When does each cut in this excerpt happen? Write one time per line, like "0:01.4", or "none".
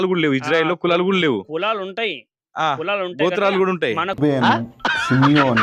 none